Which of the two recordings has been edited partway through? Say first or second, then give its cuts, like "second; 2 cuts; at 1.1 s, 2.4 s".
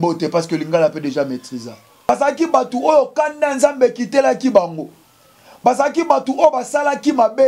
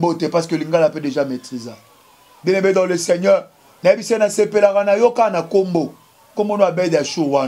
first; 1 cut; at 2.1 s